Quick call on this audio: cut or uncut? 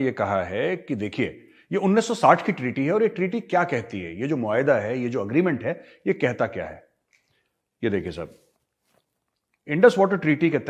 uncut